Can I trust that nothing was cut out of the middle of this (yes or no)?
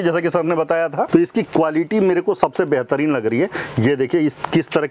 no